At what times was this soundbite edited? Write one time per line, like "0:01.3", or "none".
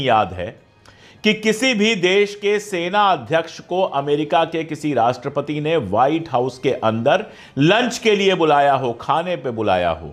none